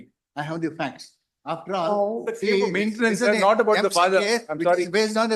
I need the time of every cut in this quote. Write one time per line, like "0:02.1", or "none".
none

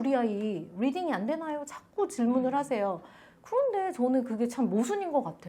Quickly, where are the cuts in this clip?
none

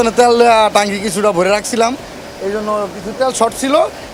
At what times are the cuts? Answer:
none

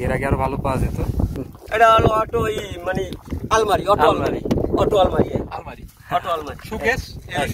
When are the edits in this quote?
0:01.3

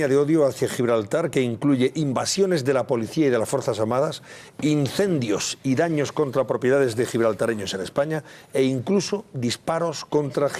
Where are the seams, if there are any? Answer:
0:01.5

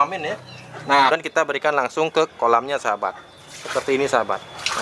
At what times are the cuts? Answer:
0:01.1

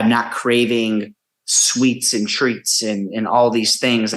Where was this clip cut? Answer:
none

